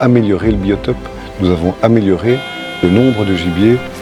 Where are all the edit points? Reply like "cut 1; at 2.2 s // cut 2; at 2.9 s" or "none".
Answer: none